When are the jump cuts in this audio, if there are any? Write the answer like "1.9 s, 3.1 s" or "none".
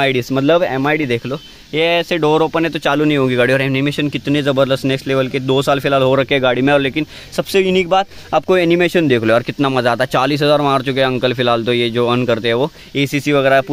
none